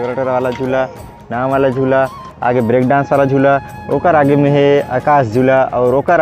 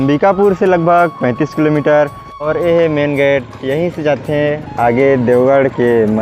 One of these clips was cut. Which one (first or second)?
second